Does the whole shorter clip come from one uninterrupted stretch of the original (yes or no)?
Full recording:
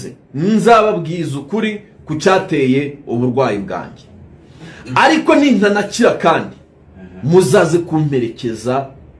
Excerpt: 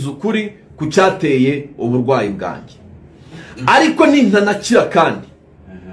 yes